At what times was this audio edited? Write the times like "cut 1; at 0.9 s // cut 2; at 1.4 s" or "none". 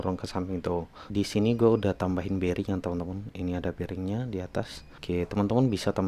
cut 1; at 1.1 s // cut 2; at 4.9 s